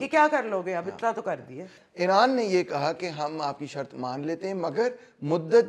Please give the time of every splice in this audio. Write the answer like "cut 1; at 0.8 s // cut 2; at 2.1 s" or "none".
cut 1; at 1.8 s